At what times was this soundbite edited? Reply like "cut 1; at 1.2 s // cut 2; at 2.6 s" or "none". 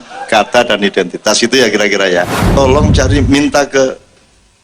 cut 1; at 2.4 s